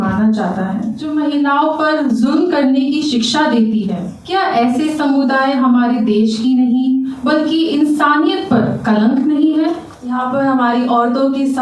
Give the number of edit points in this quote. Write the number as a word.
three